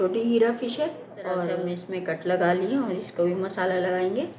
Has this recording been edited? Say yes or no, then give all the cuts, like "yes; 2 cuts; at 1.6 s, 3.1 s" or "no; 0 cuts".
yes; 1 cut; at 1.8 s